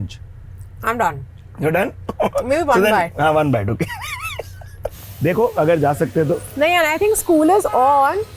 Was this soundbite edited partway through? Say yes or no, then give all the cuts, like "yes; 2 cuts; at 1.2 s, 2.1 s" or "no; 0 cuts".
yes; 1 cut; at 5.0 s